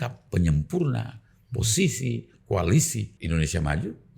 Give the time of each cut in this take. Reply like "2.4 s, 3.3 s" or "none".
3.1 s